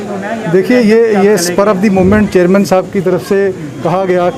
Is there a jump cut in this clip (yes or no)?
no